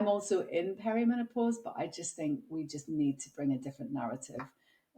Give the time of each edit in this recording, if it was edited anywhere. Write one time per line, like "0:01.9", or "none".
none